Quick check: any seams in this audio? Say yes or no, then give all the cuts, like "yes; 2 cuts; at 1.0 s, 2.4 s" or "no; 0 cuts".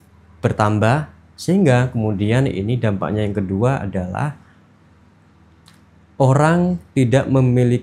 no; 0 cuts